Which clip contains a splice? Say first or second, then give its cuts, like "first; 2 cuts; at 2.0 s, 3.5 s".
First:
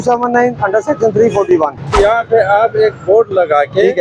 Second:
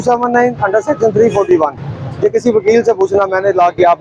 first; 1 cut; at 1.9 s